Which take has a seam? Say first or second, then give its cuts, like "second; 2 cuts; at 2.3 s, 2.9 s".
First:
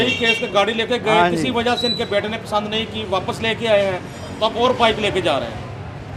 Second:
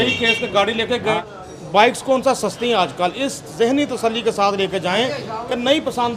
second; 1 cut; at 1.2 s